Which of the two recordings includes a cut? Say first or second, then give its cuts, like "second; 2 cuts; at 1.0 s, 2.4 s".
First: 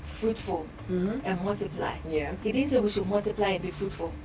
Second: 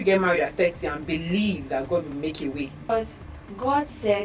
second; 1 cut; at 2.8 s